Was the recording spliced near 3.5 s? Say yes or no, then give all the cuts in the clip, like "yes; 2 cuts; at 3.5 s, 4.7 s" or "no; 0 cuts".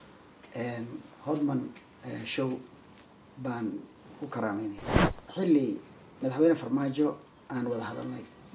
no; 1 cut; at 5.1 s